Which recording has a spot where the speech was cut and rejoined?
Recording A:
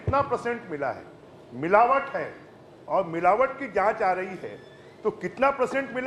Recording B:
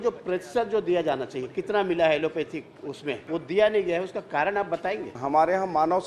B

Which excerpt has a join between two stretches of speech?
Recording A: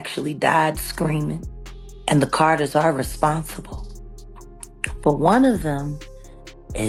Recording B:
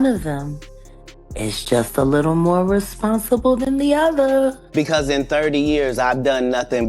B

